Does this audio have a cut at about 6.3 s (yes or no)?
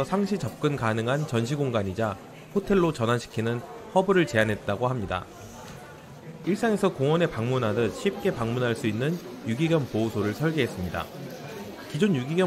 yes